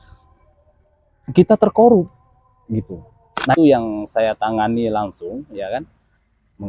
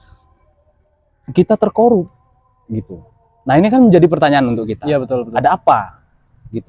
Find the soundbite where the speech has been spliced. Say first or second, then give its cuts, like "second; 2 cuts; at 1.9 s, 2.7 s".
first; 1 cut; at 3.5 s